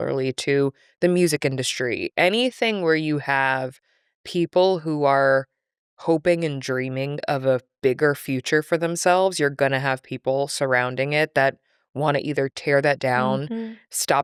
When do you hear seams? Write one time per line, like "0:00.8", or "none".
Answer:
none